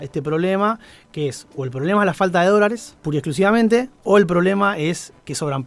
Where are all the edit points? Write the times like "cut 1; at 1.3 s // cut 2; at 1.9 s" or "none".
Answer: cut 1; at 2.9 s // cut 2; at 3.9 s